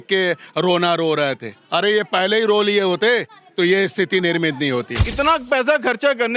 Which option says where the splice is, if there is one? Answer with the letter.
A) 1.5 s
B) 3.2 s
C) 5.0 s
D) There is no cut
C